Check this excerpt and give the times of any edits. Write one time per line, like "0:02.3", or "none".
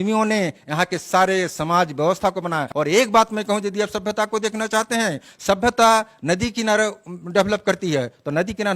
0:02.7